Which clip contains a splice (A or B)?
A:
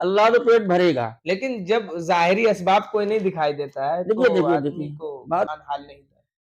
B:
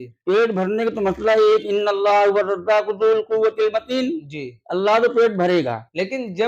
A